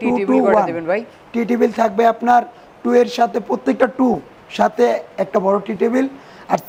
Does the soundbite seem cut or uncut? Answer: uncut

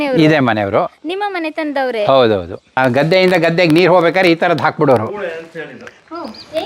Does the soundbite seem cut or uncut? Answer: cut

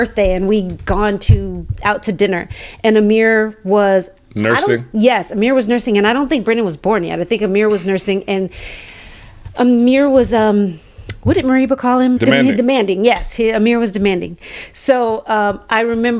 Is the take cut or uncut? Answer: uncut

